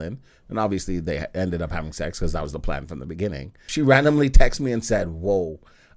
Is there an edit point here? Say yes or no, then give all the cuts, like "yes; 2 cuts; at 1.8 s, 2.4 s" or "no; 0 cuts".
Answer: yes; 1 cut; at 3.7 s